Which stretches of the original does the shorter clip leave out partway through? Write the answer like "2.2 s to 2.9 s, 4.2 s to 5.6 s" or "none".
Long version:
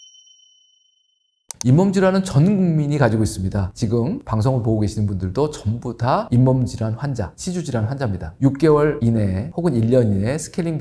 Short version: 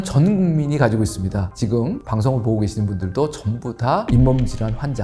none